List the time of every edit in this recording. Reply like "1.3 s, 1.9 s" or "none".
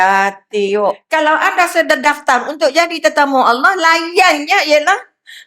1.0 s